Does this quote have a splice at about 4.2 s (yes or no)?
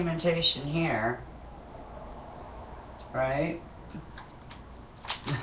no